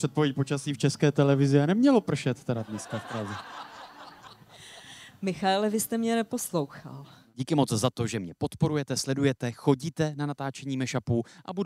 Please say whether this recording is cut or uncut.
uncut